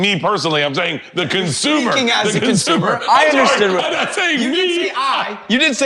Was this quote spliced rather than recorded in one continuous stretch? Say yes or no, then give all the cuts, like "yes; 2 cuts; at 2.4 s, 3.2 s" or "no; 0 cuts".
no; 0 cuts